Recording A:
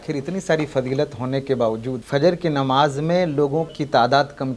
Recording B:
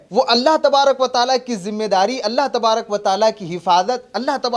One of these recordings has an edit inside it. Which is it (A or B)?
A